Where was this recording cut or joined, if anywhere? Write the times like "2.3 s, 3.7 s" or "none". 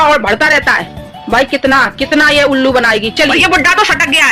3.3 s